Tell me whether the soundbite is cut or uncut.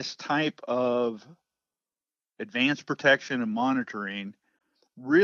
uncut